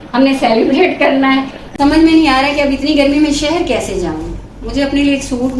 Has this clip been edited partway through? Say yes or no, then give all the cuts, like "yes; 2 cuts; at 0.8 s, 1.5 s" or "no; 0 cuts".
yes; 1 cut; at 1.6 s